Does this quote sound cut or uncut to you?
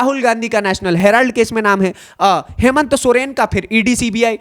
uncut